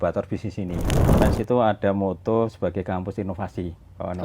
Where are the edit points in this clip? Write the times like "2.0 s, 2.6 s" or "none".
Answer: 1.1 s